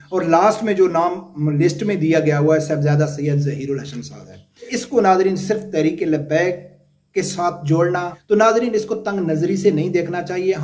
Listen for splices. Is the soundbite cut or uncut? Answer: cut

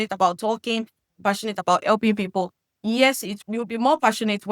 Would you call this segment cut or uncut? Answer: cut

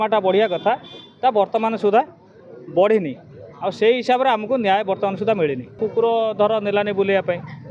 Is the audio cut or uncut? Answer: cut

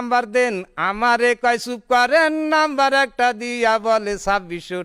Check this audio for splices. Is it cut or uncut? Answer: uncut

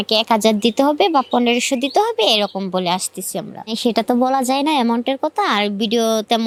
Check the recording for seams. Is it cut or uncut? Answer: uncut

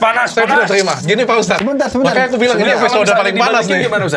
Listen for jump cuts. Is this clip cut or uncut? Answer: uncut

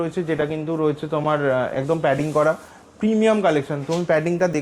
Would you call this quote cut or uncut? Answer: uncut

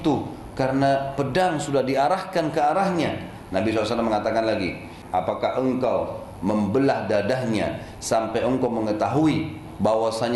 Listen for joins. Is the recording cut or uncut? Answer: cut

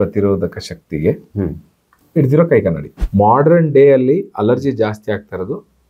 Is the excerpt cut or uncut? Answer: cut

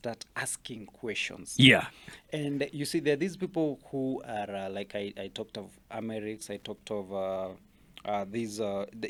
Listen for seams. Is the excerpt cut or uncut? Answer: uncut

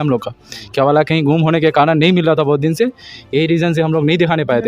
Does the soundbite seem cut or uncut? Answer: uncut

